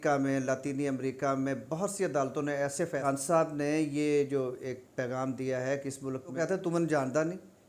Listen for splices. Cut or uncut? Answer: cut